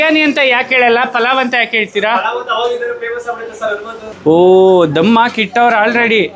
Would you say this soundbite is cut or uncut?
cut